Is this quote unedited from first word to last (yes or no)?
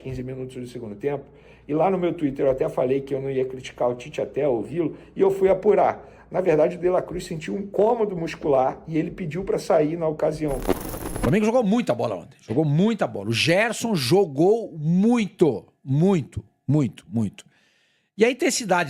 no